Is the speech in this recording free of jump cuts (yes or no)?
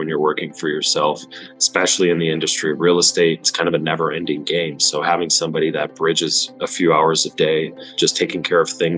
no